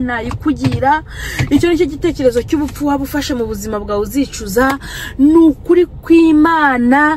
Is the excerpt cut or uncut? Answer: uncut